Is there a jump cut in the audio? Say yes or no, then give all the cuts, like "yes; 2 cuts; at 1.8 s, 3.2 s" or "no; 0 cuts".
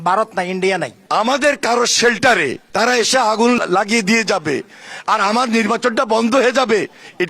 yes; 3 cuts; at 1.0 s, 2.6 s, 3.6 s